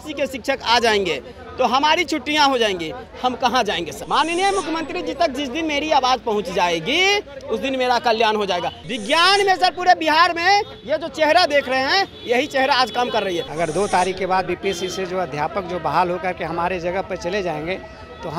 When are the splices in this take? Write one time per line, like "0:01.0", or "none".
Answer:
0:03.9
0:08.8
0:13.5